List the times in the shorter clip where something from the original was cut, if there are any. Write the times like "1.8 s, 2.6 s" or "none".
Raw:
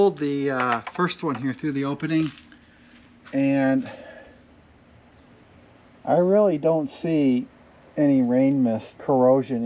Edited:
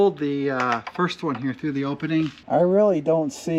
2.4 s

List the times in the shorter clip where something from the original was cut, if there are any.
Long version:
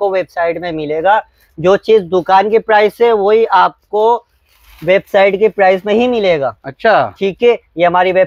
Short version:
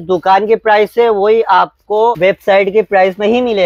2.2 s

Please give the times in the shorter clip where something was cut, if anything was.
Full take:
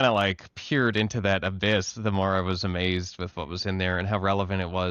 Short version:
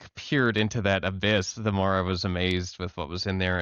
none

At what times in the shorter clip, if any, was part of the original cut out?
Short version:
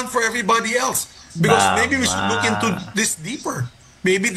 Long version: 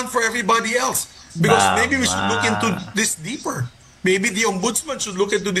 none

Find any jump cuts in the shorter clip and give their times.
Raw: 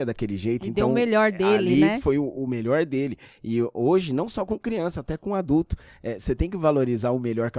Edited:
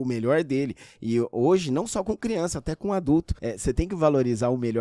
3.4 s

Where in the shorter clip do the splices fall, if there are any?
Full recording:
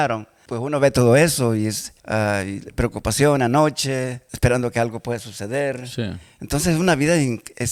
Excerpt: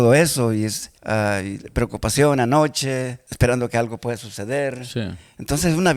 none

